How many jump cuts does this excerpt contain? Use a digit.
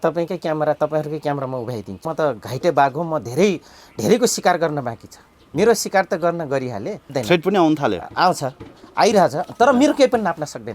2